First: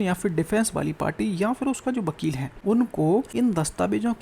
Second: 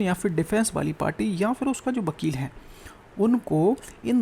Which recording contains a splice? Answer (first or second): first